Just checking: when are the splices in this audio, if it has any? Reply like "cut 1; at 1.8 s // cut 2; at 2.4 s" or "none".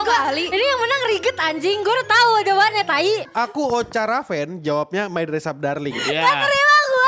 cut 1; at 3.3 s